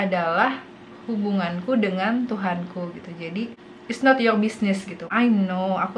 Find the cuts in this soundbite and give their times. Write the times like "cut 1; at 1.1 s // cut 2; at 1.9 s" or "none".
cut 1; at 3.7 s // cut 2; at 5.0 s